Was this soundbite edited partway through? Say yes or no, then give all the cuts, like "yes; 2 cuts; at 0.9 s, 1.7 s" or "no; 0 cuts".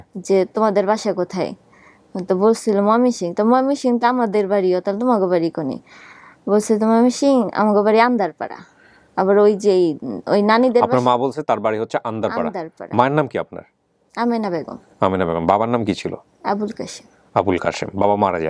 no; 0 cuts